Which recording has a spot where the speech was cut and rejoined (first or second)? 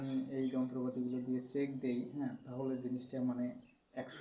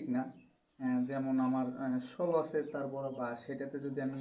second